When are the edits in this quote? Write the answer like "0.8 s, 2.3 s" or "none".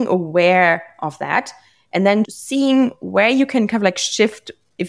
2.4 s